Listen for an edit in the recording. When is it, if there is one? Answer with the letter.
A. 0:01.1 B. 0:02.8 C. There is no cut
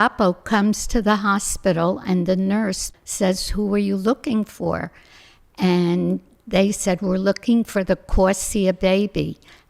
B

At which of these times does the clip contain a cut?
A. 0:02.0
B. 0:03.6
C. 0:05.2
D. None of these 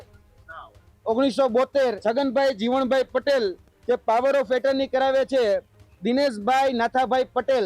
A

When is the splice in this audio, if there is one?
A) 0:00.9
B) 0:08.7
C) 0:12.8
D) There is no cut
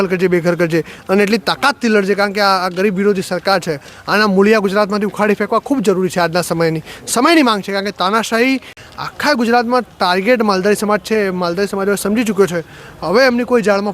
B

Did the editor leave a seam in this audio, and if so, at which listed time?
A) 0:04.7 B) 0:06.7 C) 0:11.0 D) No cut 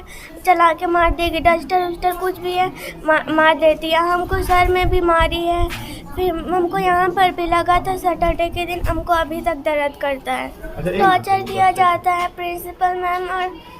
C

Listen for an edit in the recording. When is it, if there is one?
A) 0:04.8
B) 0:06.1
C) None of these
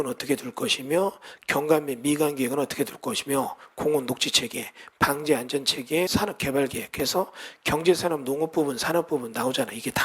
B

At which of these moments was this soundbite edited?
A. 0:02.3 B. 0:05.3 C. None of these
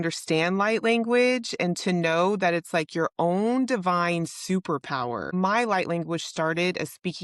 B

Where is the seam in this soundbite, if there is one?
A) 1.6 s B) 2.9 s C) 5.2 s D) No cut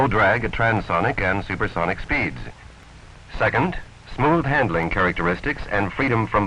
B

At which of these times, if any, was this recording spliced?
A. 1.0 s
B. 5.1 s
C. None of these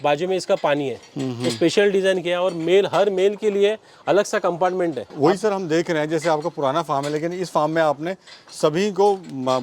C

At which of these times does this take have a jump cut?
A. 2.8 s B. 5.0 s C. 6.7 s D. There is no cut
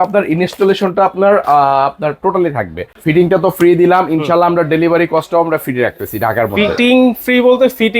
A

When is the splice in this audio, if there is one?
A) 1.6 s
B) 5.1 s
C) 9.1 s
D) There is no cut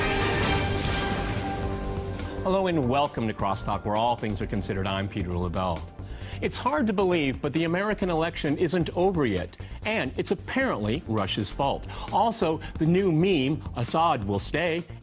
A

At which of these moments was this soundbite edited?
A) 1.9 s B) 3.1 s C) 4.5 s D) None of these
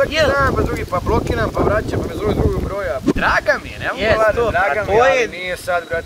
B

